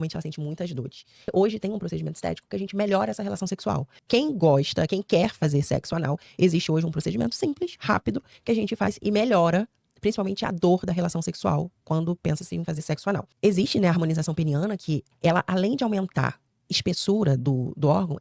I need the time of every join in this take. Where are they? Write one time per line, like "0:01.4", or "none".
0:01.3
0:03.9
0:13.3
0:15.1